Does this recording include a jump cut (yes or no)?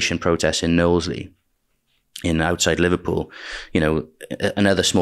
no